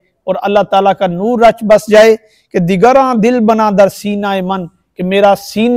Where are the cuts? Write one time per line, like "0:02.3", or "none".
none